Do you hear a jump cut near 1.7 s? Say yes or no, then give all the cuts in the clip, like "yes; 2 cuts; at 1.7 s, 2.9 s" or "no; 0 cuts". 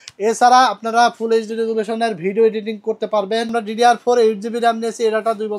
no; 1 cut; at 3.5 s